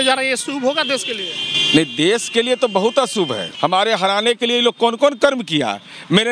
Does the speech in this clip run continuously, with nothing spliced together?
no; 1 cut; at 3.5 s

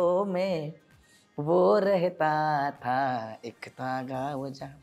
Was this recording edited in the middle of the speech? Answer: no; 0 cuts

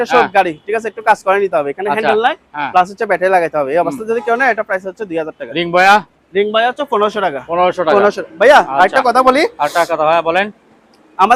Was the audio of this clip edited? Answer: no; 0 cuts

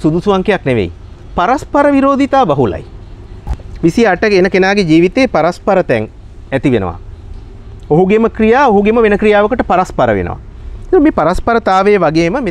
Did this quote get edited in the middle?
no; 0 cuts

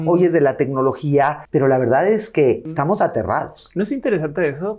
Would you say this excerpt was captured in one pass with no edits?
no; 2 cuts; at 1.4 s, 2.7 s

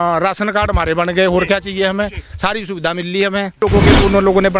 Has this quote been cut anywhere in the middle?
yes; 1 cut; at 3.5 s

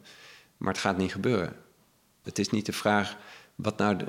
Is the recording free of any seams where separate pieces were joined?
no; 1 cut; at 2.2 s

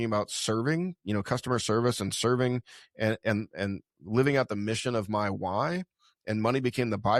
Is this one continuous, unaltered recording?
yes; 0 cuts

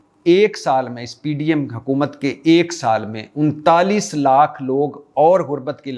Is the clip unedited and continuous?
yes; 0 cuts

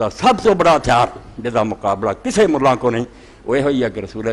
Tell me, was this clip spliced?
no; 0 cuts

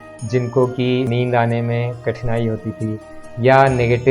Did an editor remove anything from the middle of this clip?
yes; 1 cut; at 1.1 s

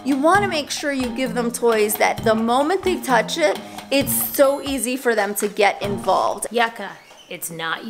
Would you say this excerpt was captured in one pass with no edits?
no; 1 cut; at 6.5 s

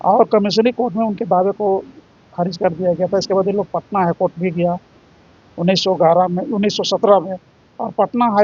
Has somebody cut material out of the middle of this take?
no; 0 cuts

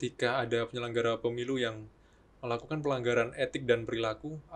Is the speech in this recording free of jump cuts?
yes; 0 cuts

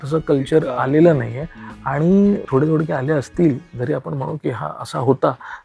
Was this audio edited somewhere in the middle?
yes; 1 cut; at 2.4 s

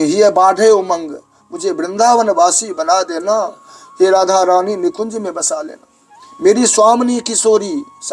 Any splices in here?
no; 0 cuts

